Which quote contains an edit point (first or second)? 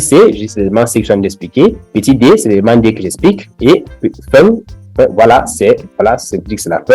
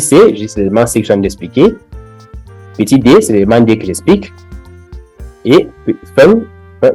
first